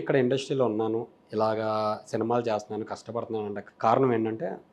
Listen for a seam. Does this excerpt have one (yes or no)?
yes